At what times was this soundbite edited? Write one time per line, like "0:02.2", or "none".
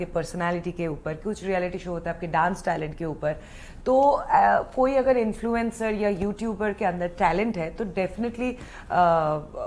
none